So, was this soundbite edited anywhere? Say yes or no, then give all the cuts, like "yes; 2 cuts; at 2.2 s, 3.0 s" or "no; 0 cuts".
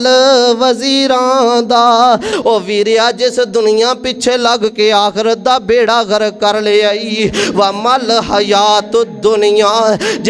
yes; 1 cut; at 2.3 s